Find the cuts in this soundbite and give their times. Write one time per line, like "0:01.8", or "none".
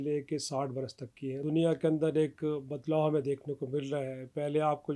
0:01.3

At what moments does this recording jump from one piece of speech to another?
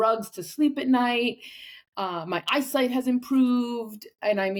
none

